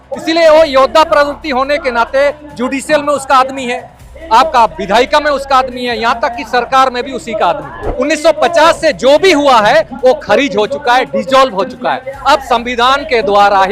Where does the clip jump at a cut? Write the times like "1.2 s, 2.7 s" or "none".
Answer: 7.8 s